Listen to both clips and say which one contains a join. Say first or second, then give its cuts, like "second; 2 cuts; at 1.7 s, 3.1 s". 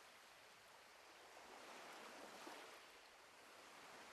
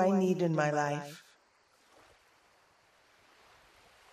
second; 1 cut; at 1.2 s